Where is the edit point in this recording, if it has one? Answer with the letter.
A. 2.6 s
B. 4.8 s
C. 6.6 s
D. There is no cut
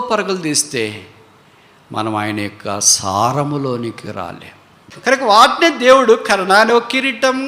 B